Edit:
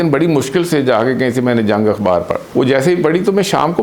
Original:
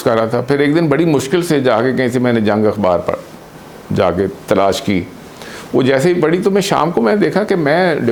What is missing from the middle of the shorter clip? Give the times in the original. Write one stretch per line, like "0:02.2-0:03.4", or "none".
0:03.2-0:05.6